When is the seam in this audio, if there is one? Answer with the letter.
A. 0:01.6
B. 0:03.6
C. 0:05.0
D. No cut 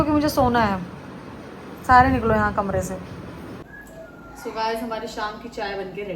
B